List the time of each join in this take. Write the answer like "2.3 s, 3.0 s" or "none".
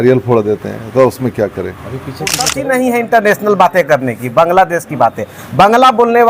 2.6 s